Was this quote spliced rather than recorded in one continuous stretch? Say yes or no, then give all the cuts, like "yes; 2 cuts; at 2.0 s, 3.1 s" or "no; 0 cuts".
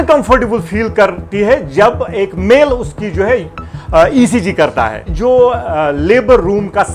yes; 1 cut; at 5.1 s